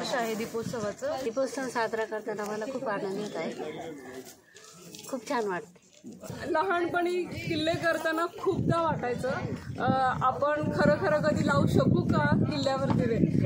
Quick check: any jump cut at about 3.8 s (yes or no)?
no